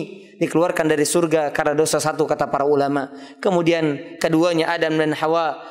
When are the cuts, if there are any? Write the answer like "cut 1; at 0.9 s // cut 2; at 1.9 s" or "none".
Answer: none